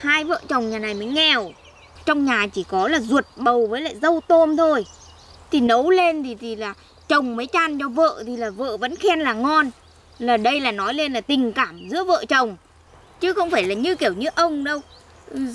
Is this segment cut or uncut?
uncut